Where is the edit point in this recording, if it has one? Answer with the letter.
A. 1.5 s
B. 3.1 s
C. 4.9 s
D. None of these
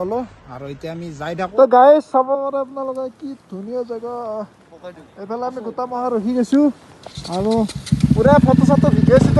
A